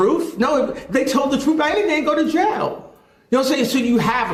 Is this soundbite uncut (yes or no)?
yes